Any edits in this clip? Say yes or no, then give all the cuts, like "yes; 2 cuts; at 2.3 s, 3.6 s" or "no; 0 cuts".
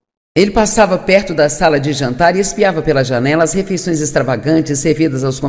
yes; 1 cut; at 3.5 s